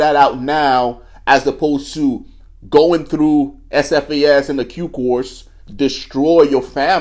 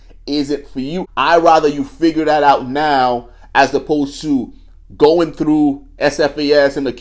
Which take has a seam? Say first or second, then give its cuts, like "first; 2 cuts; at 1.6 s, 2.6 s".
second; 1 cut; at 1.0 s